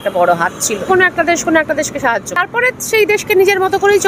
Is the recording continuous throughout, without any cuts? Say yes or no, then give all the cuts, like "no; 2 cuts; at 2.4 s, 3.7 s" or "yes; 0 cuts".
no; 2 cuts; at 0.9 s, 2.4 s